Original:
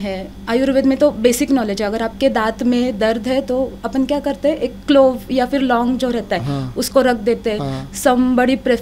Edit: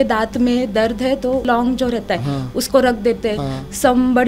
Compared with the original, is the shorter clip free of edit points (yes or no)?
no